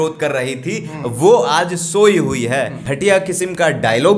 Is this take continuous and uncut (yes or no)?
no